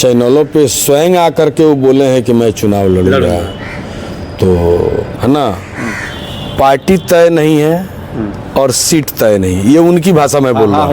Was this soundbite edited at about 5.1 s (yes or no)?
yes